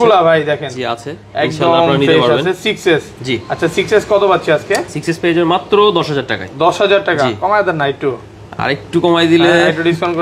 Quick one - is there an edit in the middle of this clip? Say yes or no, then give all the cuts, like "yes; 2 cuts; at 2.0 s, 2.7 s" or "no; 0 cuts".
no; 0 cuts